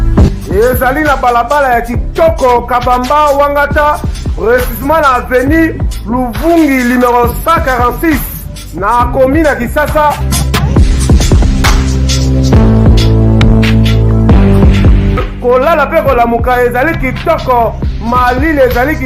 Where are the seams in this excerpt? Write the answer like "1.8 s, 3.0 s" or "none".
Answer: none